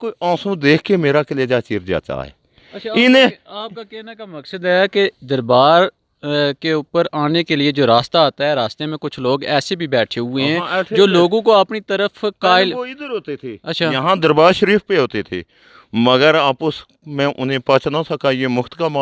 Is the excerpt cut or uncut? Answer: uncut